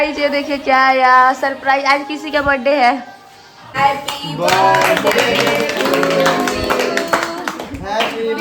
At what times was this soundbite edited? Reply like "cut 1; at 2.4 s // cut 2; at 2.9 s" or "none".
cut 1; at 3.7 s

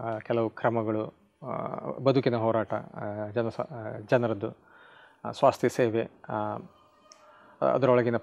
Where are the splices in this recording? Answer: none

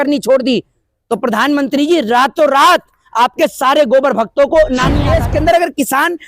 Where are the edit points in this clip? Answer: cut 1; at 5.1 s

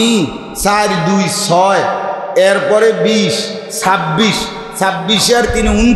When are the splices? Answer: none

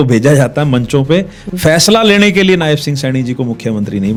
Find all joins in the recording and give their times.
none

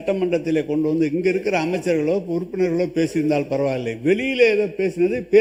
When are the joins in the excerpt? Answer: none

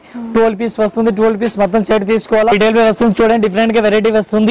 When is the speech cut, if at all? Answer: cut 1; at 2.5 s

